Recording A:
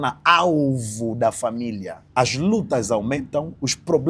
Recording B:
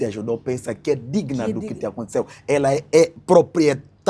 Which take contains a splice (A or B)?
A